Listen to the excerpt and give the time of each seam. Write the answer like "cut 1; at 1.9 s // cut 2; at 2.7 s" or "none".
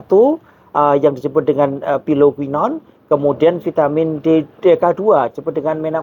none